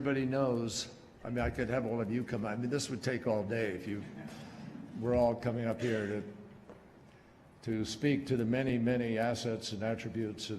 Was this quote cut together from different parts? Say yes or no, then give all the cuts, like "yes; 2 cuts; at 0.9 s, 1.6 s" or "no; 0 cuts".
yes; 1 cut; at 2.7 s